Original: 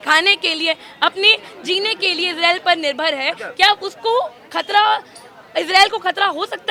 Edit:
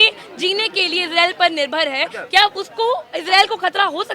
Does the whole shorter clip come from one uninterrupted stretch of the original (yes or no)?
no